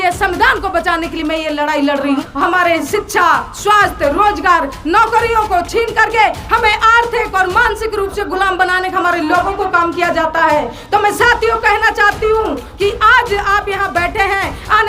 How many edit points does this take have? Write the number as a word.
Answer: one